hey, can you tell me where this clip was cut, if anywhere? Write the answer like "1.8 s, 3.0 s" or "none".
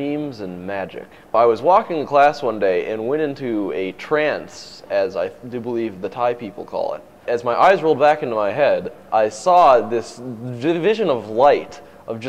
1.3 s, 7.2 s